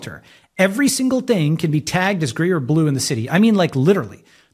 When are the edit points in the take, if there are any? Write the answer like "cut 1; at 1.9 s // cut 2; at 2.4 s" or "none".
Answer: none